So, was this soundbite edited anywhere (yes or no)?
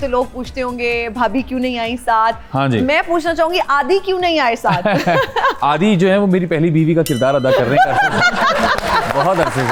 no